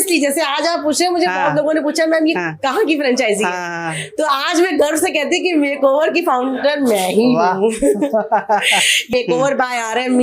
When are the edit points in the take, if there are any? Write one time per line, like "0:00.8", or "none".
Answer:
0:09.1